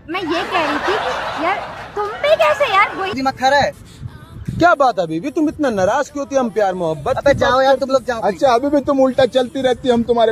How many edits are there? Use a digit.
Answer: 1